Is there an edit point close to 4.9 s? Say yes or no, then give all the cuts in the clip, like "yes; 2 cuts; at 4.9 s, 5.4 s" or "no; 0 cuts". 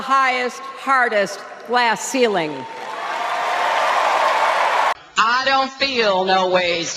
yes; 1 cut; at 4.9 s